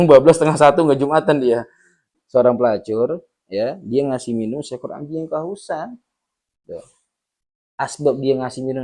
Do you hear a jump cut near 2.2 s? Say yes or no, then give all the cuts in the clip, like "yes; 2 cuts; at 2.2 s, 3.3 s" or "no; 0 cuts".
yes; 1 cut; at 2.2 s